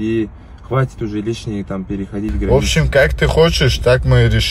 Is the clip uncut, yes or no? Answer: no